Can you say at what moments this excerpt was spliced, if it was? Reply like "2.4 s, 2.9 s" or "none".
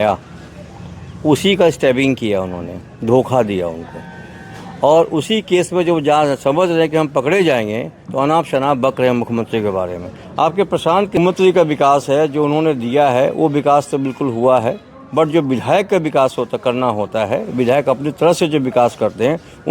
11.2 s